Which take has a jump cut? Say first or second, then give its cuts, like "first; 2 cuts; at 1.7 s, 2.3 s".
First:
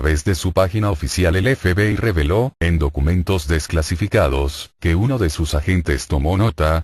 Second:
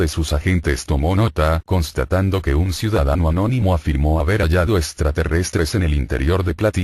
first; 1 cut; at 2.6 s